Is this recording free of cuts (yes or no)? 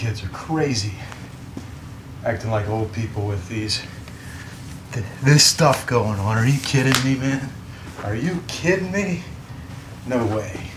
yes